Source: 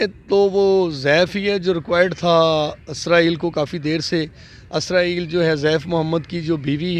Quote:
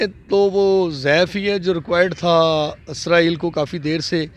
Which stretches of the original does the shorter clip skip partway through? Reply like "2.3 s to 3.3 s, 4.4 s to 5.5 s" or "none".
none

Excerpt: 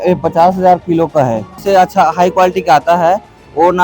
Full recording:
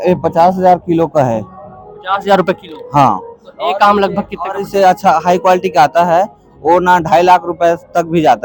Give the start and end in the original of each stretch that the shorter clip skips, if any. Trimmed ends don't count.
1.5 s to 4.6 s

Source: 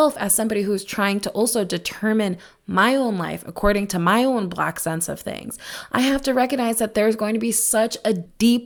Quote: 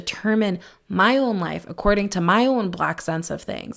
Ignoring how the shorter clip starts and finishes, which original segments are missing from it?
none

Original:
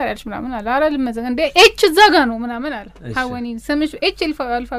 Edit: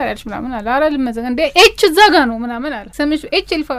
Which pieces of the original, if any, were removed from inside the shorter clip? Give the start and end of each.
2.9 s to 3.6 s

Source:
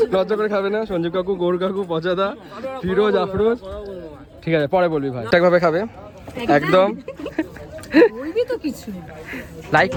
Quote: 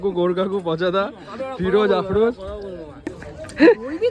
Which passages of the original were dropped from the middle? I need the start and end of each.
4.3 s to 7.4 s

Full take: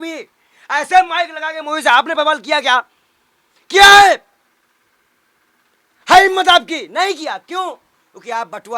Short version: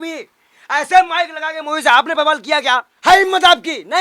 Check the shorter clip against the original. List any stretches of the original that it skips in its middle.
2.9 s to 6.0 s

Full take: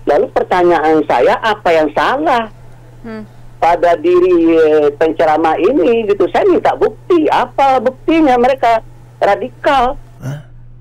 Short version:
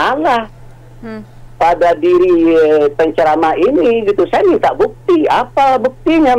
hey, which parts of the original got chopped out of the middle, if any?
none

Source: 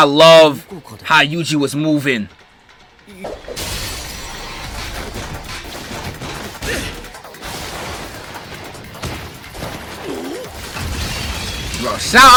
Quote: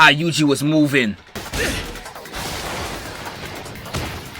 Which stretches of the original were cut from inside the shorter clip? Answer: 2.5 s to 6.5 s

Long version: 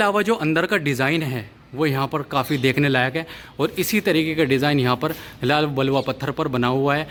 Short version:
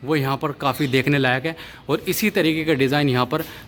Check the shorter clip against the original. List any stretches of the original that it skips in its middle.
none

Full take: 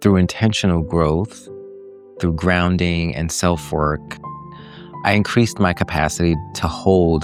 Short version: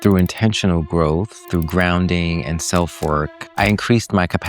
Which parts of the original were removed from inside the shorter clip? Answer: 1.4 s to 2.1 s, 4.1 s to 4.9 s

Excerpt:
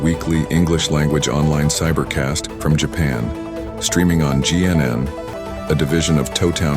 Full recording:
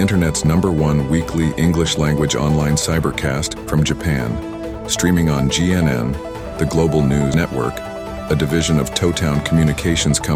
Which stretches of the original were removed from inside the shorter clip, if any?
6.4 s to 7.9 s

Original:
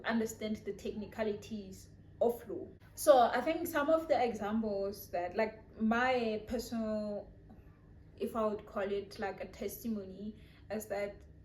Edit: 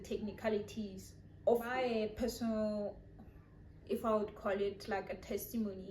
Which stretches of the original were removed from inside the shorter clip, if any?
2.5 s to 6.1 s

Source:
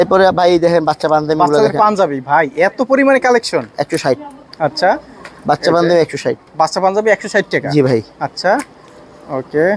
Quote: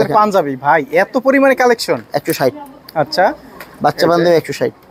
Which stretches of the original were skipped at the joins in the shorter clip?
none

